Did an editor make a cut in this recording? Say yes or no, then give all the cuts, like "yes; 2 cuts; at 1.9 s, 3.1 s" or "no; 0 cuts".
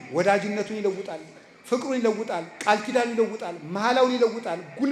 no; 0 cuts